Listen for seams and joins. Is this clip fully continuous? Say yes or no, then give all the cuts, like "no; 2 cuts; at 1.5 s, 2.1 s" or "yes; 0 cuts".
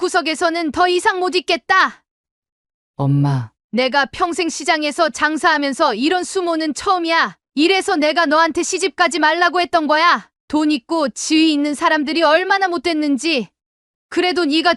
yes; 0 cuts